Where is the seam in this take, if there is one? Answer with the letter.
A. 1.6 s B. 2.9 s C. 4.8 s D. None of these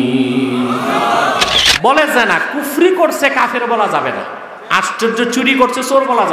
A